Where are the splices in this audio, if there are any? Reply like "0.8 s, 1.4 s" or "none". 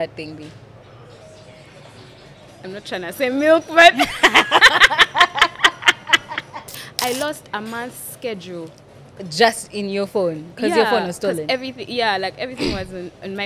1.2 s, 6.8 s